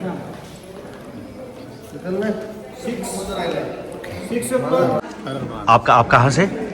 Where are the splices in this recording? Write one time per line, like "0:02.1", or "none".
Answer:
0:05.0